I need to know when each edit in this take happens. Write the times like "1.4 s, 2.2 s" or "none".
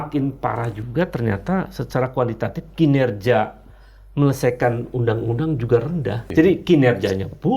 6.2 s